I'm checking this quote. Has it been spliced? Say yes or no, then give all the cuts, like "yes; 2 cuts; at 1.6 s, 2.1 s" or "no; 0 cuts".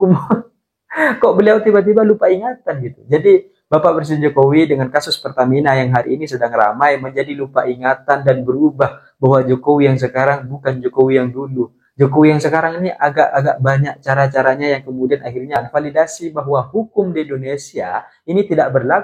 yes; 1 cut; at 15.6 s